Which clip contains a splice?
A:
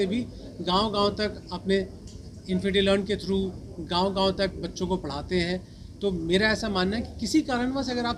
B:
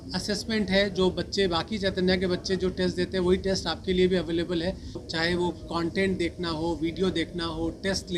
B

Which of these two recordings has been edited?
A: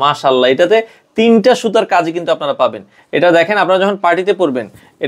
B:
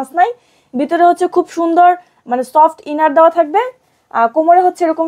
A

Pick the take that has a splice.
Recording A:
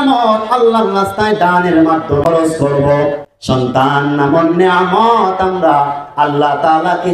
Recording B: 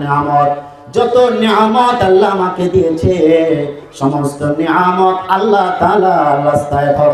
A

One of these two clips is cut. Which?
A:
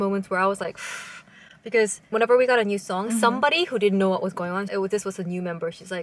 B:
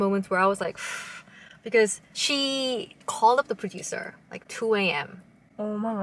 B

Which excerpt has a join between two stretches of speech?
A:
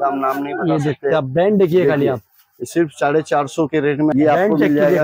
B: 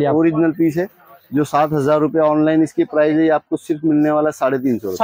A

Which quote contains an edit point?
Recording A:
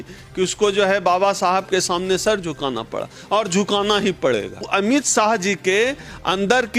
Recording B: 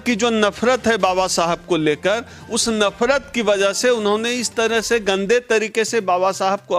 A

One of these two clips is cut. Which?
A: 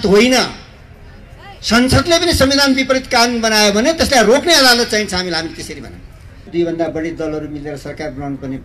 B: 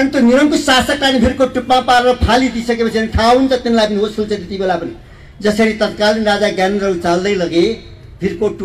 A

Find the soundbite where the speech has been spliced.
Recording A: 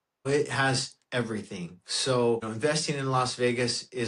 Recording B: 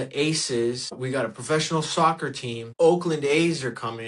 B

